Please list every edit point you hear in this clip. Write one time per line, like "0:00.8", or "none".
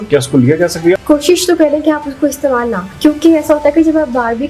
0:01.0
0:02.9